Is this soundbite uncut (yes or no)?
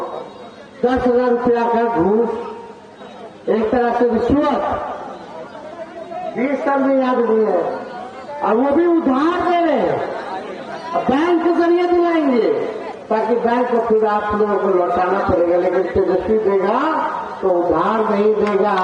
yes